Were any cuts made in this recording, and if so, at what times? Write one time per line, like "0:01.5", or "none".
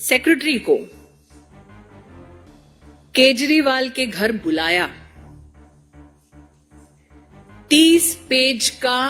none